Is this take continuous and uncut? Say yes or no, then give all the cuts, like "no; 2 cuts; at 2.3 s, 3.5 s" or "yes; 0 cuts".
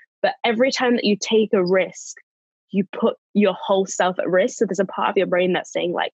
yes; 0 cuts